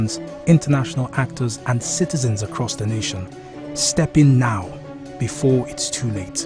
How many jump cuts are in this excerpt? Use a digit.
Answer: 0